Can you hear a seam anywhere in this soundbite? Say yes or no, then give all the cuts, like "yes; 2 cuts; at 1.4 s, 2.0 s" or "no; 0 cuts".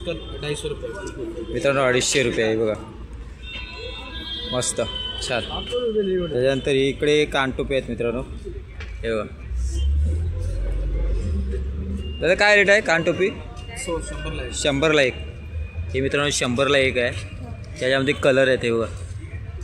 no; 0 cuts